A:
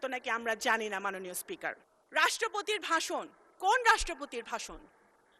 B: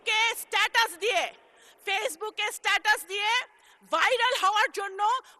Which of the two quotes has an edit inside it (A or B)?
A